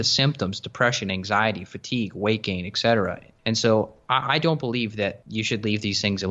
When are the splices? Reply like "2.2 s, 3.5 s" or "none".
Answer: 3.3 s, 5.2 s